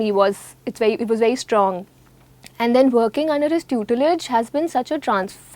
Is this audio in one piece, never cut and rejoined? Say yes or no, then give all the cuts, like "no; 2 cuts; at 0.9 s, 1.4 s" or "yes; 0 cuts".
yes; 0 cuts